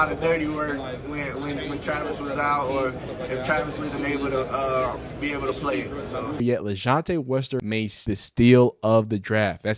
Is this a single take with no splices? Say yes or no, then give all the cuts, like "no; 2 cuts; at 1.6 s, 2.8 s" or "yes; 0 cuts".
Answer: no; 2 cuts; at 6.4 s, 8.0 s